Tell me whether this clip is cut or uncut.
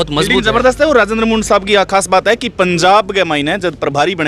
uncut